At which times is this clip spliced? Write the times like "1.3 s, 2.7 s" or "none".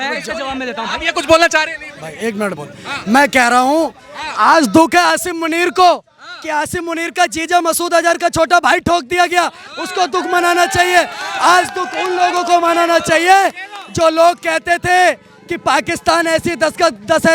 none